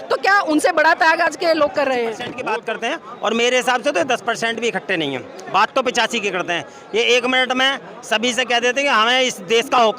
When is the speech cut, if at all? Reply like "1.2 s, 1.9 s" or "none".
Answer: 2.3 s